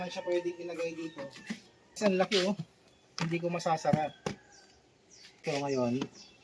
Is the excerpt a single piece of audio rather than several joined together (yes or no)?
no